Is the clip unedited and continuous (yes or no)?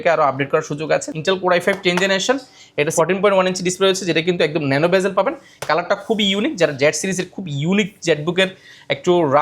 no